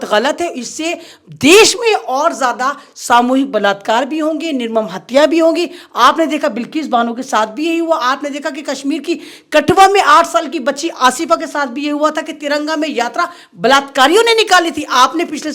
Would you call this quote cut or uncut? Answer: uncut